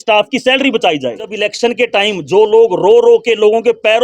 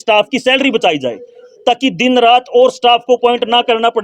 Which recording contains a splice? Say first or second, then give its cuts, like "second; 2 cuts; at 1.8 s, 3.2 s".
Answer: first; 1 cut; at 1.4 s